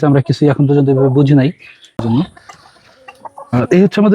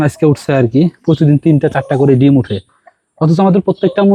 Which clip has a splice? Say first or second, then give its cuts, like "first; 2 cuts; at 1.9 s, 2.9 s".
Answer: first; 1 cut; at 2.0 s